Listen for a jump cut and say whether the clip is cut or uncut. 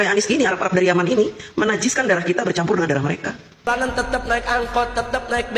cut